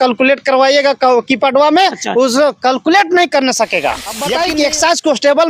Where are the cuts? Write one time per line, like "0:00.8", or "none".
0:04.3